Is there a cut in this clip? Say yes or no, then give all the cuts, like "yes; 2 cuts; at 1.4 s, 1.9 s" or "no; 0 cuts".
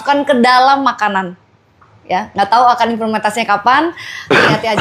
no; 0 cuts